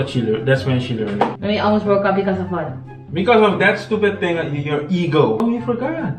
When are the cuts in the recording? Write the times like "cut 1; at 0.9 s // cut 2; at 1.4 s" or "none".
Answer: cut 1; at 1.4 s // cut 2; at 5.4 s